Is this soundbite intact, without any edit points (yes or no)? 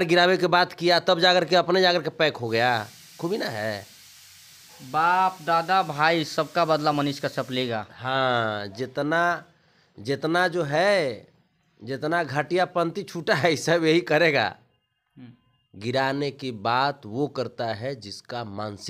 yes